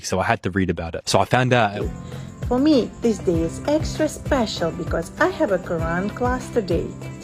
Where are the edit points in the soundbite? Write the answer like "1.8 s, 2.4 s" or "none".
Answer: 1.8 s